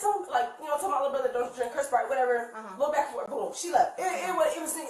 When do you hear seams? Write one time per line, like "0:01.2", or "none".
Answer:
none

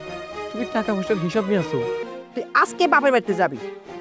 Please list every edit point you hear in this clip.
0:02.0

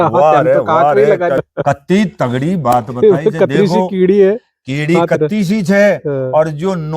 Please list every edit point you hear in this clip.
0:01.4

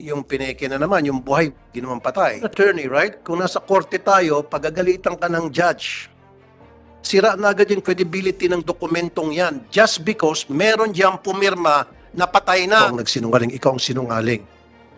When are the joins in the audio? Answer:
0:02.4
0:12.7

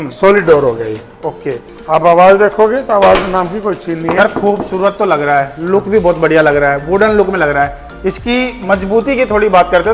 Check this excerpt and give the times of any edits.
none

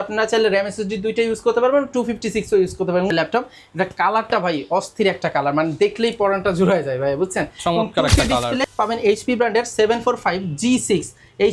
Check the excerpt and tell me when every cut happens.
0:03.1
0:08.6

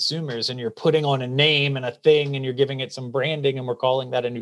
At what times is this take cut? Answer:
none

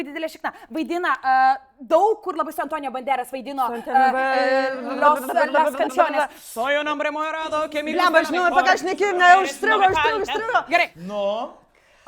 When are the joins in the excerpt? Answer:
0:11.0

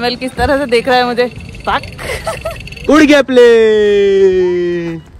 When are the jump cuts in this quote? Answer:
0:02.7

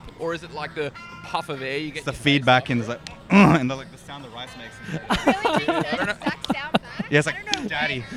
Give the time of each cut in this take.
none

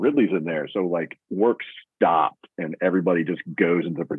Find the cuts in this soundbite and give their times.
none

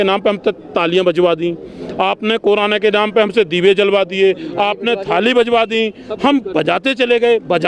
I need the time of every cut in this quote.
none

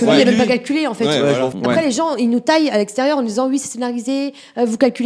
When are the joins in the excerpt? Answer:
0:01.5

